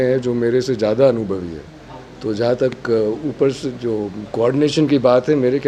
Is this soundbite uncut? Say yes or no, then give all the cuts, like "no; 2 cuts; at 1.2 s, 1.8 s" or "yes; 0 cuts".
yes; 0 cuts